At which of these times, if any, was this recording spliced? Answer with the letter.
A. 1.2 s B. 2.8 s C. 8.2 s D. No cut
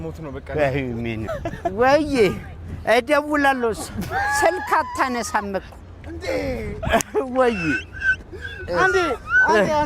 A